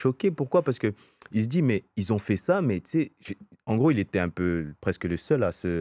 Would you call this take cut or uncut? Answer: uncut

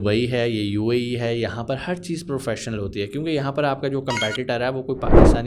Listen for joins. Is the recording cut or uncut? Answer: uncut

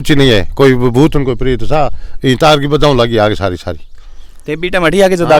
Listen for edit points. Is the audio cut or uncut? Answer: uncut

